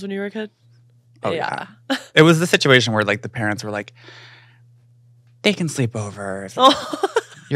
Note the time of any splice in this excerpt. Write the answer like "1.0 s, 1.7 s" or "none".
none